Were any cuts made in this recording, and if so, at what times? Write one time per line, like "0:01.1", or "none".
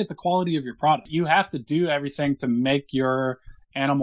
0:01.1